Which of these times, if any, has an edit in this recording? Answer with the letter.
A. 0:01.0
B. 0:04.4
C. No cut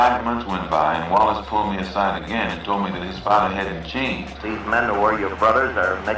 B